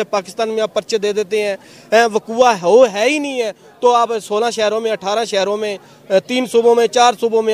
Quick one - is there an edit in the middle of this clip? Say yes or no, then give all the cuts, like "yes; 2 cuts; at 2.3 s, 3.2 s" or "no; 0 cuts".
no; 0 cuts